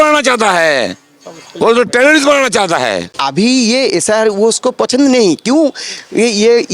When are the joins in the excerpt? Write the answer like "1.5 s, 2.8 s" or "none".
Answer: 3.2 s